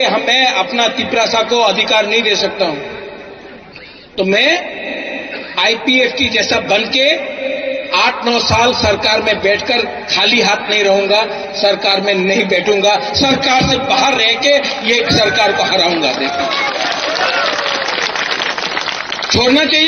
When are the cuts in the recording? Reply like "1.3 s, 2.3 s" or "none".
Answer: none